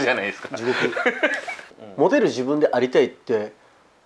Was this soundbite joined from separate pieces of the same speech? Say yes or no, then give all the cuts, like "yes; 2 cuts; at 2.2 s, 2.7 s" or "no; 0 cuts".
yes; 1 cut; at 1.5 s